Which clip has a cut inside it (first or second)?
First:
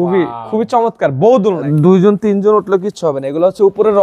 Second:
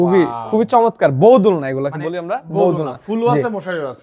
first